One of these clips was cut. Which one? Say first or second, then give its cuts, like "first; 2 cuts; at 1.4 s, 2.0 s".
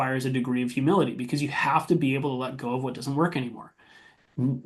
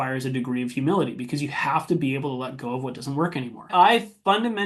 second; 1 cut; at 3.7 s